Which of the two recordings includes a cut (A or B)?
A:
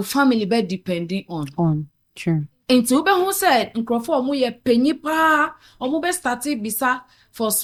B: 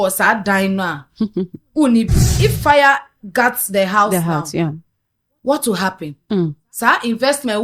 B